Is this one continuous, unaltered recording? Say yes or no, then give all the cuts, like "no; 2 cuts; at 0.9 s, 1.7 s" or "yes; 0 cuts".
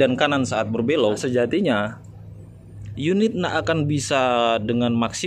yes; 0 cuts